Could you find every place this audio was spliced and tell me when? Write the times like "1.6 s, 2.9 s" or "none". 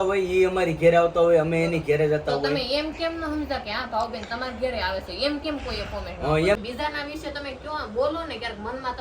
6.6 s